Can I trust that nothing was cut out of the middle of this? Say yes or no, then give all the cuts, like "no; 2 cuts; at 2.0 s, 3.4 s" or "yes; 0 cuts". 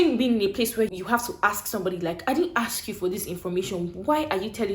no; 1 cut; at 0.9 s